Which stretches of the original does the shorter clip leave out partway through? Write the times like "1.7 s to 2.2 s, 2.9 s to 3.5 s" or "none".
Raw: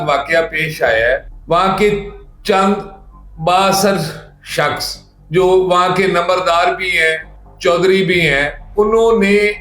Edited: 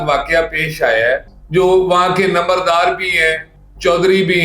1.3 s to 5.1 s